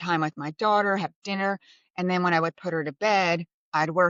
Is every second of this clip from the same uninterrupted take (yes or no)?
yes